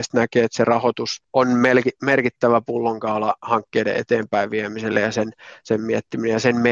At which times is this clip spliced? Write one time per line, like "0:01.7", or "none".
none